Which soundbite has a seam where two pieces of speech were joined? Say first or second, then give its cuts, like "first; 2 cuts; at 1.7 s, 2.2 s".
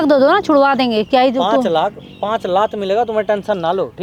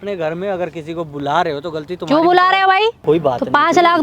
second; 1 cut; at 3.0 s